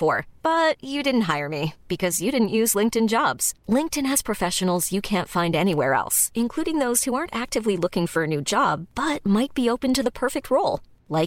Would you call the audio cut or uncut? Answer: uncut